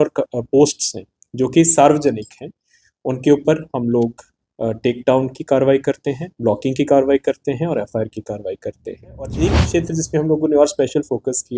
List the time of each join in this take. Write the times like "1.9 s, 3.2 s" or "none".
9.4 s